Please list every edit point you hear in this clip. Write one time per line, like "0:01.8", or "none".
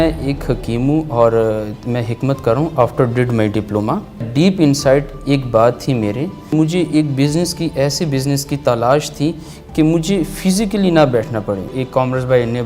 0:04.3
0:06.5
0:11.7